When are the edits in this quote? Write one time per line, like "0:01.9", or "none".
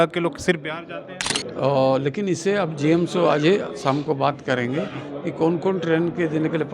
0:01.2